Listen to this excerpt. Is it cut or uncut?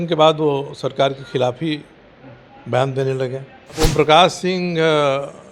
cut